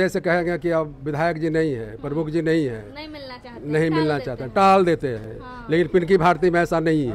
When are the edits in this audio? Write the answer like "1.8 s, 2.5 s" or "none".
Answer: none